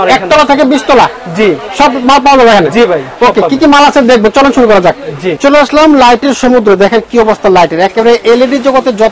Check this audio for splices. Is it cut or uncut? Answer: uncut